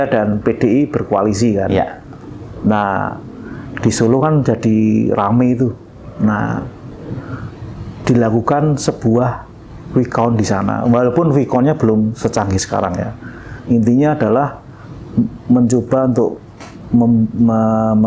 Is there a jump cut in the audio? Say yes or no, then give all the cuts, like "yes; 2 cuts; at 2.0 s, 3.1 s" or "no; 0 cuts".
no; 0 cuts